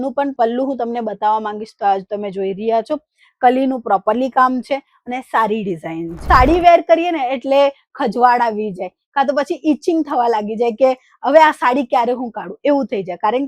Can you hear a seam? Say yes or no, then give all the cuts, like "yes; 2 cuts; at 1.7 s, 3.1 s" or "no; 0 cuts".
yes; 1 cut; at 6.1 s